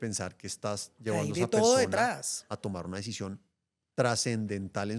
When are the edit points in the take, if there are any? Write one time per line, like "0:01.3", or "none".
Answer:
none